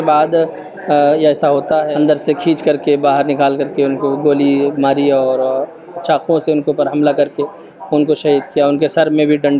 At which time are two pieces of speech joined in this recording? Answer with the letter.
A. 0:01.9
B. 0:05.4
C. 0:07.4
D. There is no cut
A